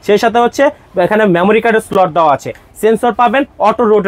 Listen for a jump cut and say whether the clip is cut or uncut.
uncut